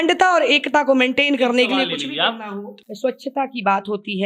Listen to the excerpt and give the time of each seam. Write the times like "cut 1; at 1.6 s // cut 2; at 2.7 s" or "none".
cut 1; at 2.7 s

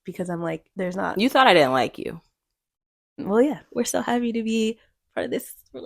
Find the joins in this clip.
cut 1; at 1.0 s // cut 2; at 3.6 s

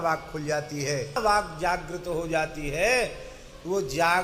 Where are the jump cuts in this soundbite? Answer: cut 1; at 1.2 s

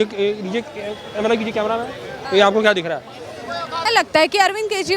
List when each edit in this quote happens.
cut 1; at 3.8 s

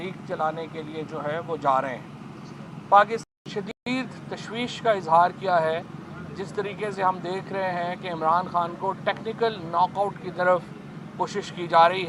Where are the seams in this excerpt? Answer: cut 1; at 3.2 s

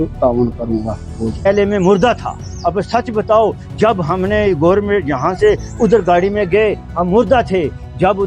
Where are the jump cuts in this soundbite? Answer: cut 1; at 1.5 s

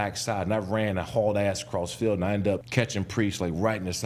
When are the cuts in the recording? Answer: cut 1; at 2.7 s

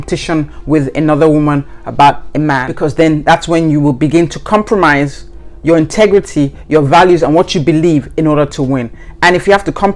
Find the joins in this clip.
cut 1; at 2.7 s

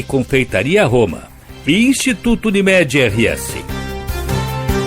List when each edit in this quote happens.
cut 1; at 3.8 s

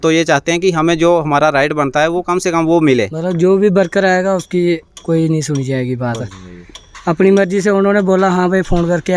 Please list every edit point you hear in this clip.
cut 1; at 3.2 s

